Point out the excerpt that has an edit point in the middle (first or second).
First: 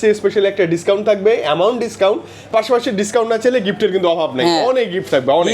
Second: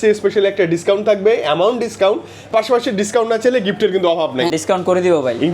second